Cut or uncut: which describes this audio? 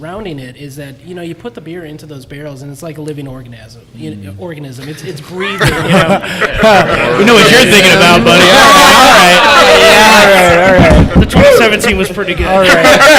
uncut